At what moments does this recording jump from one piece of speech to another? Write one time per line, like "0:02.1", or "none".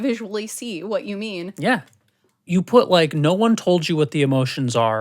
0:02.3

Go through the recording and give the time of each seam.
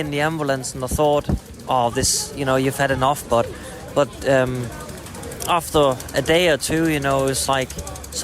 0:01.5

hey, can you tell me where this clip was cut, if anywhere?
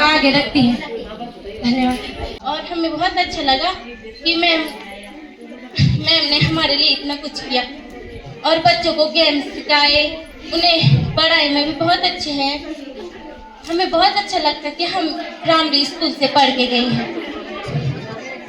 0:02.2

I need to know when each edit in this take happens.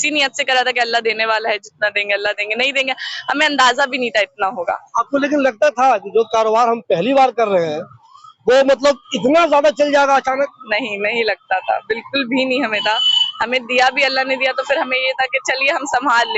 none

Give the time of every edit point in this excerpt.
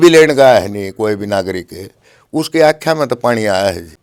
none

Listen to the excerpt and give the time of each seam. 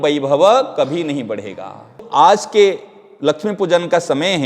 0:02.1

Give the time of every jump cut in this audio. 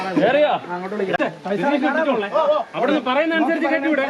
0:01.2

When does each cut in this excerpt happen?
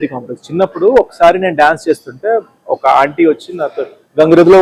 none

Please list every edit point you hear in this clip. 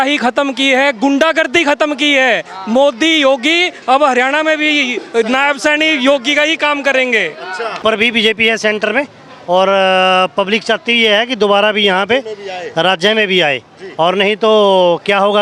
0:07.8

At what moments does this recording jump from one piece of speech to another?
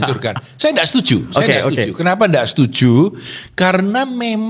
none

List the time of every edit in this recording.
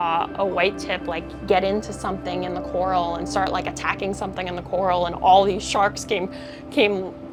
none

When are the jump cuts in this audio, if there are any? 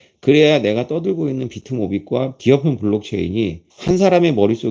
0:02.3
0:03.7

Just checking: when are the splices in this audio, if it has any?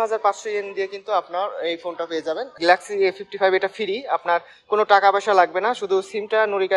0:02.6

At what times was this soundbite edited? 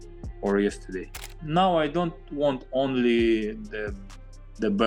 0:01.1

